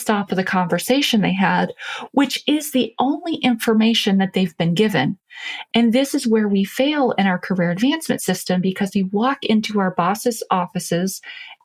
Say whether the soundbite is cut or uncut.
uncut